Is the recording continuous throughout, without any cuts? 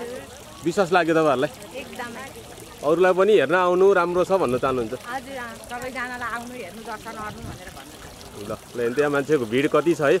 yes; 0 cuts

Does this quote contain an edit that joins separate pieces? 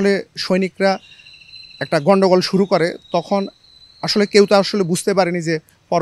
no; 0 cuts

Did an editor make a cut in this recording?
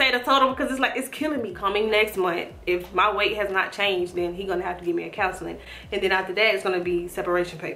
yes; 1 cut; at 1.5 s

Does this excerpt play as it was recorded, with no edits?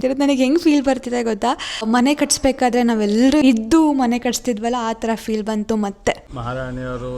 no; 3 cuts; at 1.8 s, 3.4 s, 6.3 s

